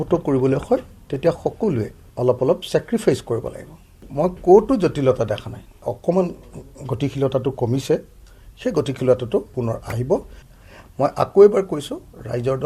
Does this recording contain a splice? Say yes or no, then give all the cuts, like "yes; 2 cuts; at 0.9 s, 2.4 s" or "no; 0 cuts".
yes; 4 cuts; at 2.0 s, 4.1 s, 5.9 s, 10.4 s